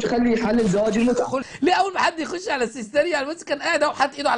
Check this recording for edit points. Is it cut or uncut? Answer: cut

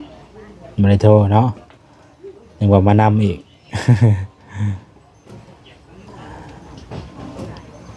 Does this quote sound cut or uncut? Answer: uncut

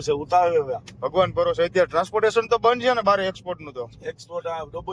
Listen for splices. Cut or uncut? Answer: uncut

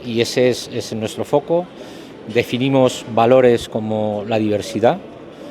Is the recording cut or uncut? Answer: uncut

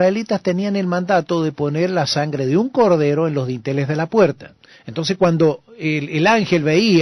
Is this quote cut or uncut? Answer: cut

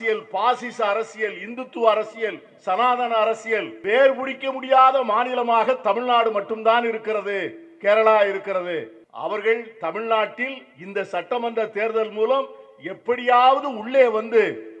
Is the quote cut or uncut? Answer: cut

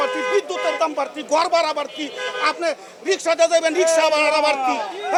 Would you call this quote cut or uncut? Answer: uncut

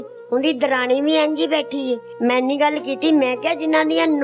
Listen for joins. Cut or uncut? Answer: cut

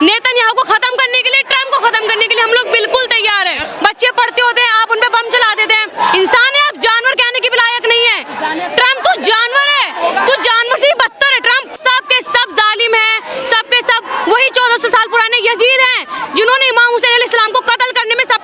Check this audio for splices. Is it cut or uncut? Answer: cut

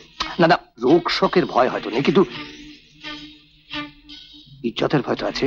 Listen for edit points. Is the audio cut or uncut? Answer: uncut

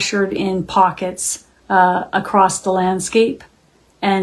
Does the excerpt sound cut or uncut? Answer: uncut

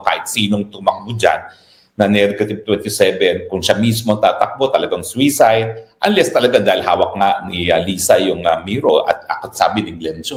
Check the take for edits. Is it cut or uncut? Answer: uncut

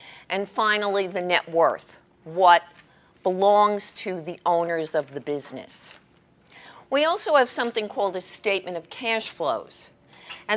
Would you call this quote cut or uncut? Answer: cut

